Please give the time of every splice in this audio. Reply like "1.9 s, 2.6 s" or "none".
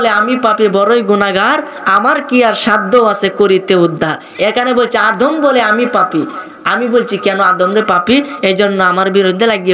none